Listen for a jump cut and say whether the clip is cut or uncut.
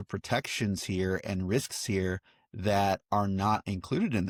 uncut